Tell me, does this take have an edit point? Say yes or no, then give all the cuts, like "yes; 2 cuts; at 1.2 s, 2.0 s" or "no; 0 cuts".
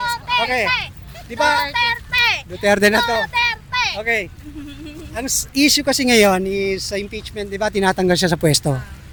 no; 0 cuts